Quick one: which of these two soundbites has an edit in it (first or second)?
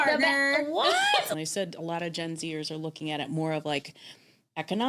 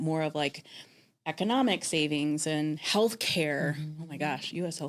first